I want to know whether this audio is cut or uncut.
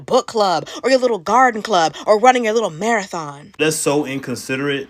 cut